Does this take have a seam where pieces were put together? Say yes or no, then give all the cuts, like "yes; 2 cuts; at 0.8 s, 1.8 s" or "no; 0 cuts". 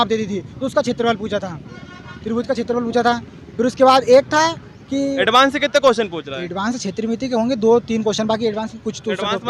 no; 0 cuts